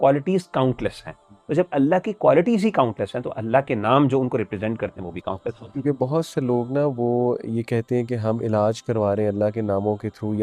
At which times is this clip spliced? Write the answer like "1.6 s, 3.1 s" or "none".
5.7 s